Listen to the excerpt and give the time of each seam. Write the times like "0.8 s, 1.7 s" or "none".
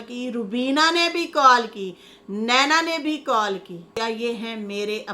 4.0 s